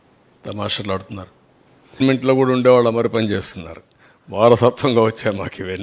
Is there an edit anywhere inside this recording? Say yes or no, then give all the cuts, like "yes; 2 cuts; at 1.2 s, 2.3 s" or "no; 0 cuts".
yes; 1 cut; at 2.0 s